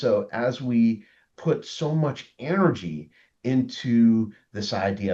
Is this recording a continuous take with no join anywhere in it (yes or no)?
yes